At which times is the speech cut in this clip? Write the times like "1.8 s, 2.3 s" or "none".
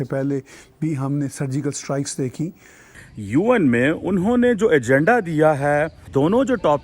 3.1 s